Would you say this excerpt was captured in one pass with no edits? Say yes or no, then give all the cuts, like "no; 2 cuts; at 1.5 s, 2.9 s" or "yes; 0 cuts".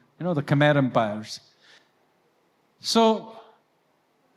yes; 0 cuts